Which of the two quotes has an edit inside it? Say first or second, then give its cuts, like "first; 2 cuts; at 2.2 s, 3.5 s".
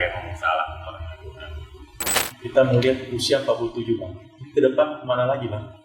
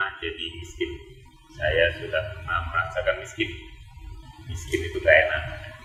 first; 1 cut; at 2.2 s